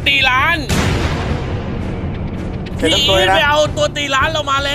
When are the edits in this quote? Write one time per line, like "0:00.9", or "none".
none